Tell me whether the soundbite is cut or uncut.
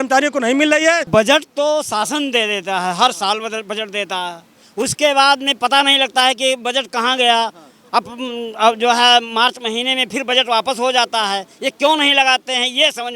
cut